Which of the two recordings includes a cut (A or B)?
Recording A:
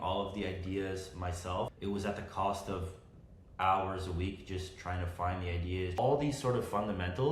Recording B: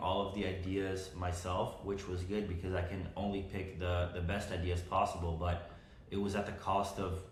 A